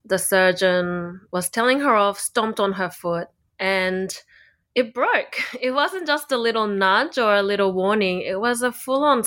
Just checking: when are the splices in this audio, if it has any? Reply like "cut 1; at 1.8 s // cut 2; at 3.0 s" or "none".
none

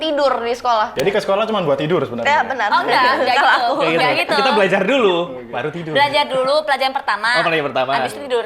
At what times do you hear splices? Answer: cut 1; at 0.9 s

